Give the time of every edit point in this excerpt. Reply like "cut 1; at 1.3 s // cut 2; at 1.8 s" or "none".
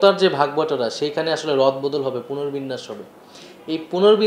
none